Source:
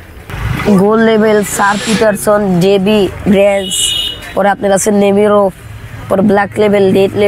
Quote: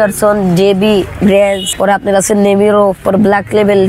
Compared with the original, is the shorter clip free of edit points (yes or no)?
no